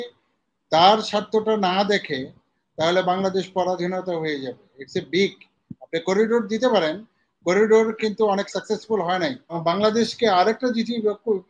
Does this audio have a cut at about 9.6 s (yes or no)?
yes